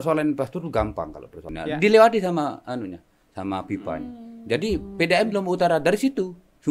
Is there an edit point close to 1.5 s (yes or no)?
yes